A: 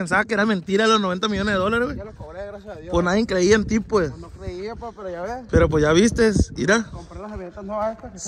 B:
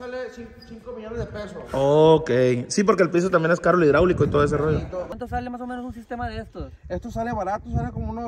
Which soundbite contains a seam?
B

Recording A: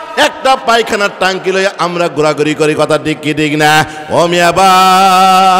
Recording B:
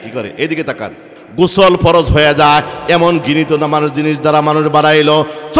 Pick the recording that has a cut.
B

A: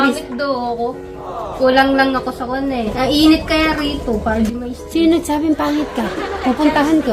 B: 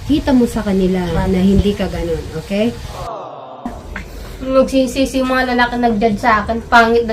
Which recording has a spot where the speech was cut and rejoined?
B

